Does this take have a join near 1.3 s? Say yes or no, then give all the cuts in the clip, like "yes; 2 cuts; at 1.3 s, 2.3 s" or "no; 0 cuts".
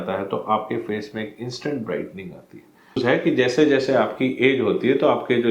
no; 1 cut; at 3.0 s